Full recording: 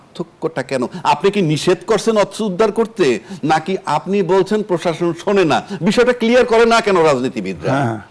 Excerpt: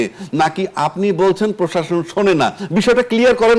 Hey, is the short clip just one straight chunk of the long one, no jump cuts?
yes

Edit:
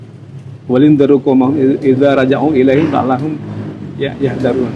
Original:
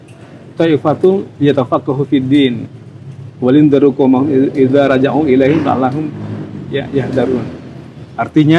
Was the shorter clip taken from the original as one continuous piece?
yes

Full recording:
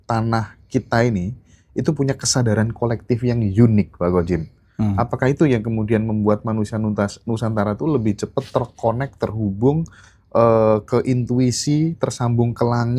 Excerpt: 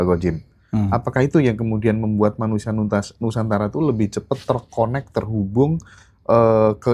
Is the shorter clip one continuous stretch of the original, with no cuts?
yes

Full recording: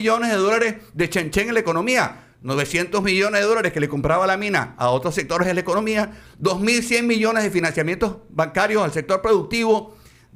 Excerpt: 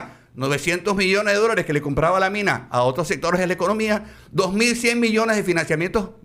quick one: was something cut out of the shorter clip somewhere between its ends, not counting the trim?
no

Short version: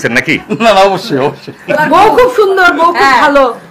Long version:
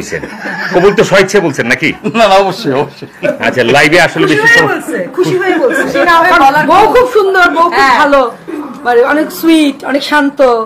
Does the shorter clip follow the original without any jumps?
no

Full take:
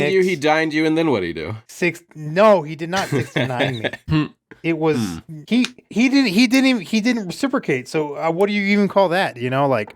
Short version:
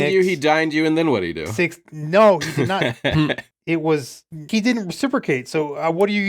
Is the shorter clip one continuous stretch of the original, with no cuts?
no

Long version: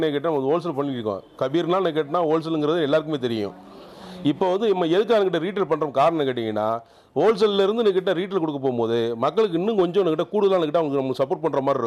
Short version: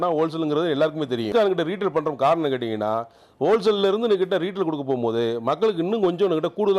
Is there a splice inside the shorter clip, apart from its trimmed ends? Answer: yes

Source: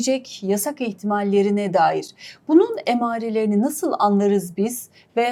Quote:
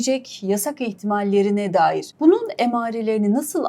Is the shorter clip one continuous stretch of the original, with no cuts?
no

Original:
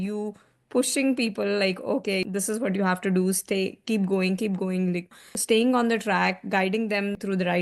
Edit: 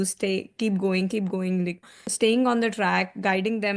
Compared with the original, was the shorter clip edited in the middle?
no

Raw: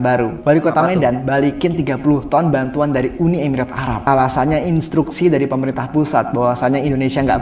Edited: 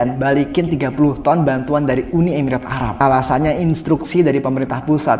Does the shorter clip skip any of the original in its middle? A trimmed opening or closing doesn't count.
no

